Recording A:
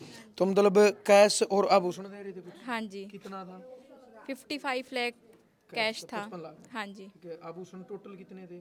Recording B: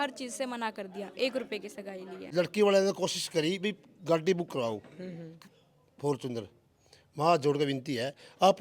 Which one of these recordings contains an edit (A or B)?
B